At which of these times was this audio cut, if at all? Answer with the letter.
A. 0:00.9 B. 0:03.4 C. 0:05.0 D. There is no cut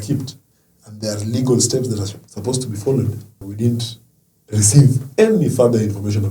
B